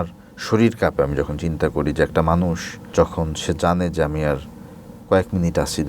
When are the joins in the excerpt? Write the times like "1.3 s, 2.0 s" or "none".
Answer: 2.9 s